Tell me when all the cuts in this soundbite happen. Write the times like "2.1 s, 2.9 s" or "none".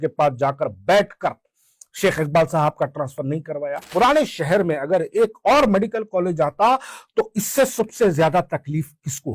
3.9 s